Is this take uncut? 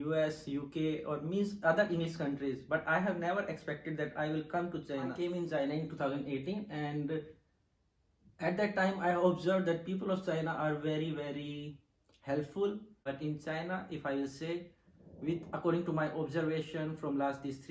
no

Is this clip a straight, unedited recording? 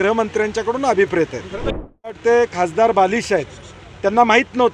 no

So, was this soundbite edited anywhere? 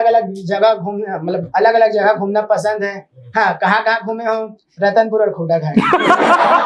no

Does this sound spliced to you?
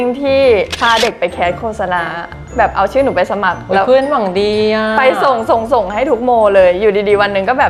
no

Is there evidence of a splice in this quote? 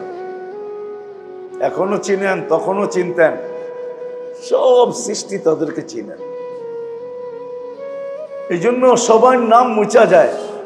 yes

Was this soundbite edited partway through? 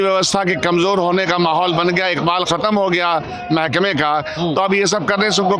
no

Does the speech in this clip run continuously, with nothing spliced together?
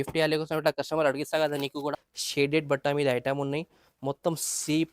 no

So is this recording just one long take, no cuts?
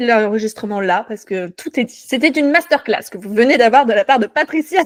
yes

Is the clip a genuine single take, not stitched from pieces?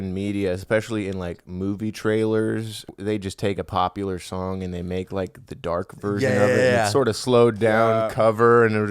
no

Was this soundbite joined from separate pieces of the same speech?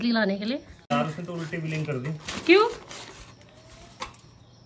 yes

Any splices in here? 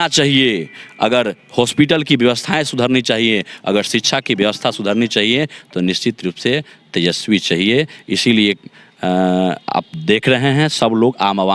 no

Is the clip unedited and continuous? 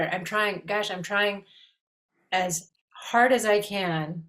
yes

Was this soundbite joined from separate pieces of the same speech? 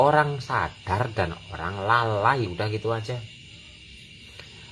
no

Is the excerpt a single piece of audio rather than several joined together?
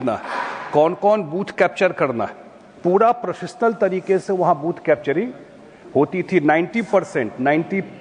yes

